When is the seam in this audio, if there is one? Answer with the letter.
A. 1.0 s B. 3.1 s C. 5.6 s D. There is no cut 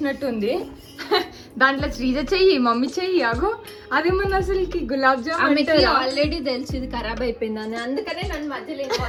D